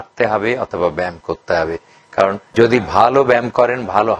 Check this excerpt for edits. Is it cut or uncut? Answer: uncut